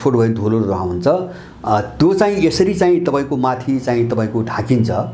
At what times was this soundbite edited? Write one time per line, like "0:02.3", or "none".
none